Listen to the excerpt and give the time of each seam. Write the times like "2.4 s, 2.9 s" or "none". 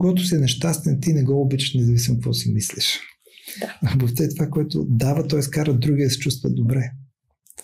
none